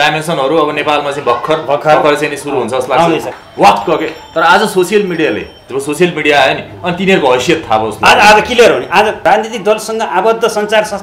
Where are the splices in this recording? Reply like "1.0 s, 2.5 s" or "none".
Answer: 3.3 s, 9.2 s